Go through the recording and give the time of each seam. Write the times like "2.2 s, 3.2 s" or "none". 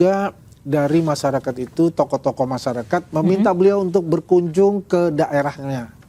none